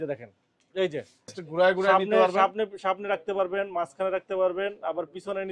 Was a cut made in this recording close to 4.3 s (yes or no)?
no